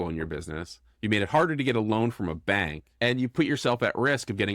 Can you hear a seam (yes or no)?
yes